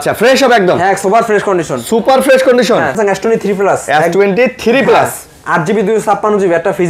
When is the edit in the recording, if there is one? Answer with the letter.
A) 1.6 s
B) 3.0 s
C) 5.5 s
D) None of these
B